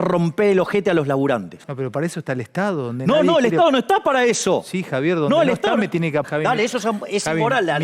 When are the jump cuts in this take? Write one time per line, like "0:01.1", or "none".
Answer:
0:01.7
0:06.2